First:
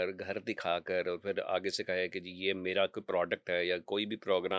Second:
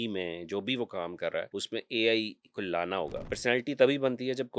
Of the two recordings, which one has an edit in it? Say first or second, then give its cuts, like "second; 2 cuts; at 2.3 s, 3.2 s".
second; 2 cuts; at 1.6 s, 3.2 s